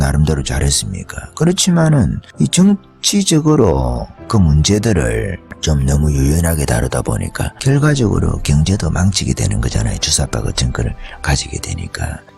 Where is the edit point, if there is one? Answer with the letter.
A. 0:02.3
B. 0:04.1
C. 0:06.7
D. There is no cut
D